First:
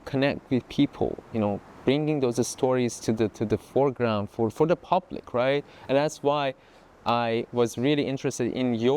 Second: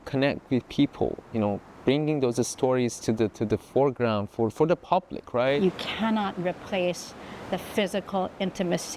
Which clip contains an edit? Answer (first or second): second